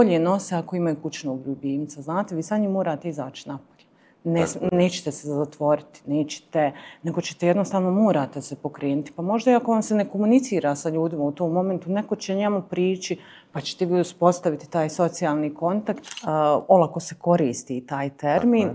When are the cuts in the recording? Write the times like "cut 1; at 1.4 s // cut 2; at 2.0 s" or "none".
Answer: cut 1; at 16.1 s